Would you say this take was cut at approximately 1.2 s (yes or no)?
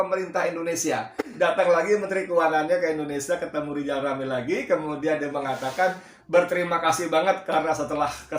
yes